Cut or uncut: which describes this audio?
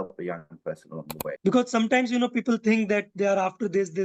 cut